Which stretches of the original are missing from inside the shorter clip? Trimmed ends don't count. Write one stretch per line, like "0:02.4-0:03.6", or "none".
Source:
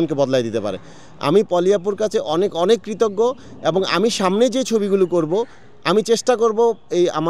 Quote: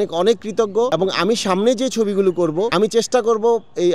0:03.3-0:03.6
0:05.4-0:05.8